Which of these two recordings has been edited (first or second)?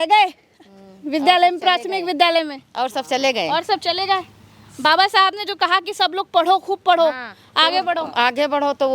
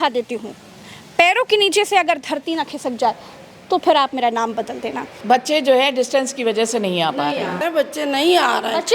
second